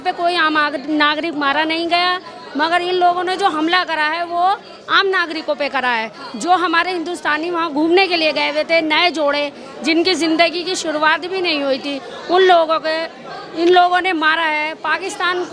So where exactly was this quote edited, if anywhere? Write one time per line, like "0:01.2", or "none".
none